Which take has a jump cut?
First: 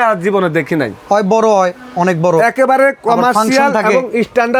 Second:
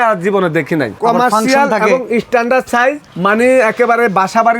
second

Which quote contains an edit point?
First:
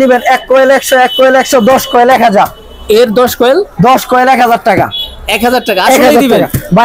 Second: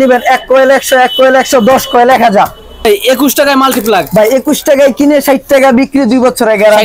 second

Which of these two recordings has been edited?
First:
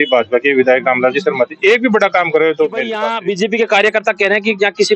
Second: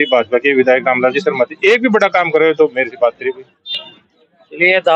first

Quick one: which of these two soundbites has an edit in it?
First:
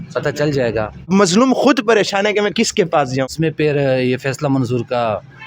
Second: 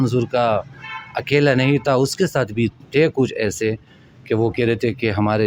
first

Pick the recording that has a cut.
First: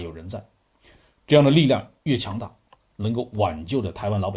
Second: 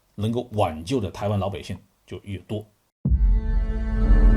second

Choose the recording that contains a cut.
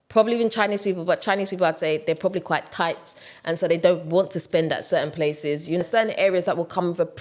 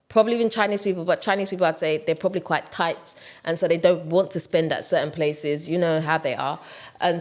first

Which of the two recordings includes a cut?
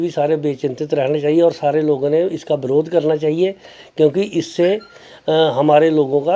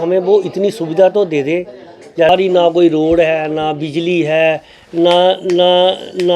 second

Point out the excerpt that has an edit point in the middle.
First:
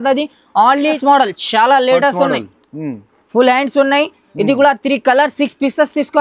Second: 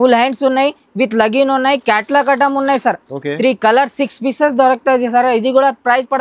first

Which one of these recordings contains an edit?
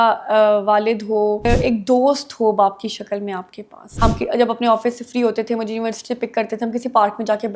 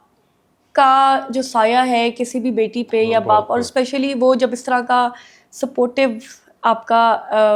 first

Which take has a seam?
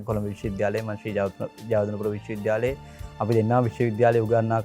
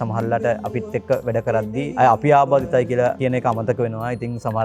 second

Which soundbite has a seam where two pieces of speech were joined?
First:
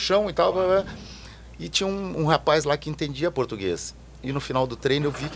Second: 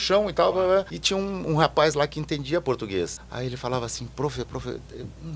second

